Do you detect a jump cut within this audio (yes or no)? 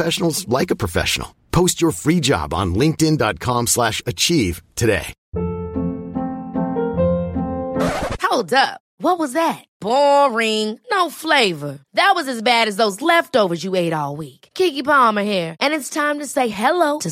yes